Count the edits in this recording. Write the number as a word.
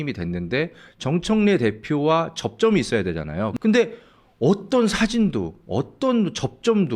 one